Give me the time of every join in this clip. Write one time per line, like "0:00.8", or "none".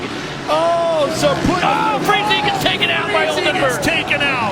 none